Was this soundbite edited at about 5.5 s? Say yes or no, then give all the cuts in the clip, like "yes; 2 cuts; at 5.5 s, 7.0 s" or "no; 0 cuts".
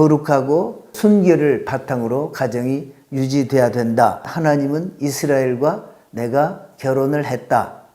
no; 2 cuts; at 0.9 s, 4.3 s